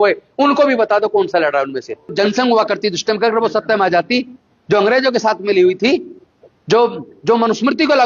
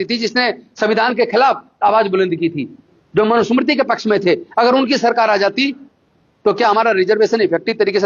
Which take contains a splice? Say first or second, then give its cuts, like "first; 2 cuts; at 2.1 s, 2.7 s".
first; 1 cut; at 2.1 s